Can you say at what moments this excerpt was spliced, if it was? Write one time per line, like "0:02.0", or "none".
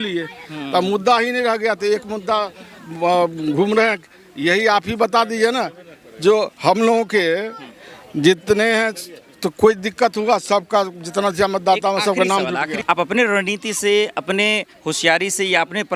0:12.8

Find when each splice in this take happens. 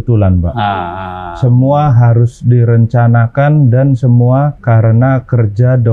0:04.6

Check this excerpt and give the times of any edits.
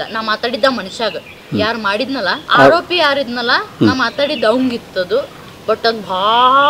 0:02.4

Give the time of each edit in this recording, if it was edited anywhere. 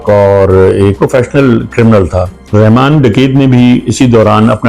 0:00.9
0:02.4

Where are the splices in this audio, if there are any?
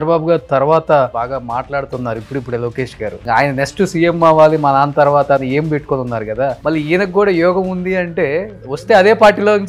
none

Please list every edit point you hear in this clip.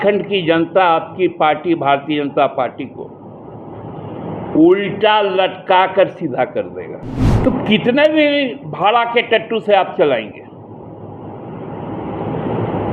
0:07.3

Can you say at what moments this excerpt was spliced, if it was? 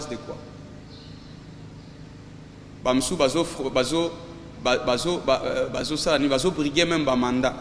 none

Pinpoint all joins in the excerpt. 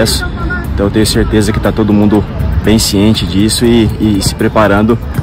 none

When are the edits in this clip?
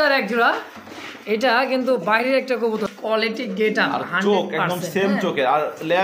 0:02.9

